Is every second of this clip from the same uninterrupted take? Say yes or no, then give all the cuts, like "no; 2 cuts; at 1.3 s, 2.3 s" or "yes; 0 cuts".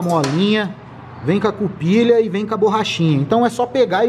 yes; 0 cuts